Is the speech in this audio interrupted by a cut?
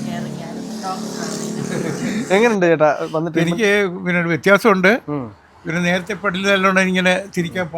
yes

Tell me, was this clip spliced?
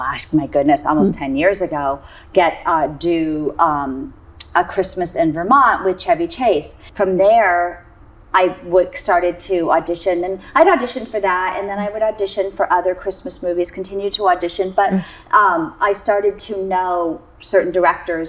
yes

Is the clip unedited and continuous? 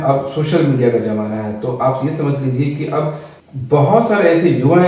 yes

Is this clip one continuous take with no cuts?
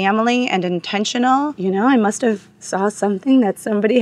no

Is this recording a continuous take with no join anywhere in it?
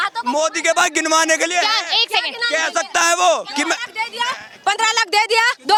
yes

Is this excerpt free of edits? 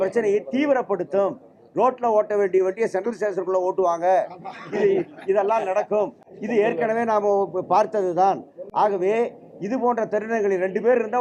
yes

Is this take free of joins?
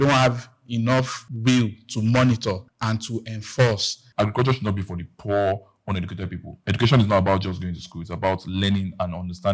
no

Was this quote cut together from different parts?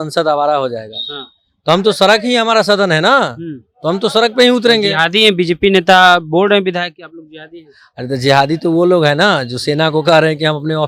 no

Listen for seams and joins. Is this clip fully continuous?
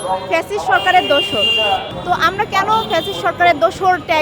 no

